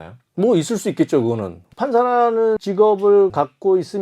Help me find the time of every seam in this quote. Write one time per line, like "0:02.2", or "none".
0:01.8